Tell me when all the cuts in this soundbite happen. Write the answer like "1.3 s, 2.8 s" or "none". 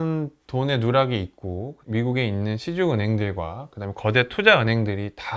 1.8 s